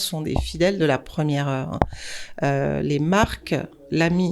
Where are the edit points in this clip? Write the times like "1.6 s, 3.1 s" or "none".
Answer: none